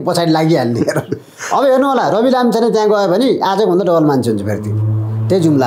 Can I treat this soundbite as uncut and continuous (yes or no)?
yes